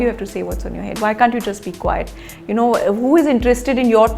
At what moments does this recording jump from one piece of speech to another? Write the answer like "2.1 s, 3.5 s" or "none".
none